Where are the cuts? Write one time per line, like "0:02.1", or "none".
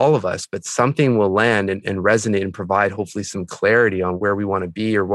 0:04.2